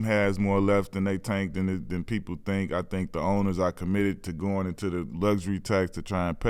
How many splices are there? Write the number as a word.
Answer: zero